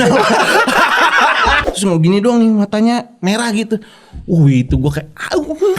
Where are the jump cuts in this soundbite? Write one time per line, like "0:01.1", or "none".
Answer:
0:01.6